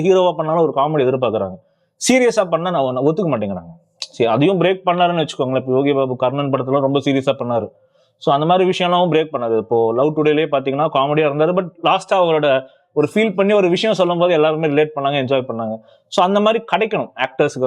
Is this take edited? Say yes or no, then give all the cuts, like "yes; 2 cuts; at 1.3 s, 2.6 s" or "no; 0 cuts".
no; 0 cuts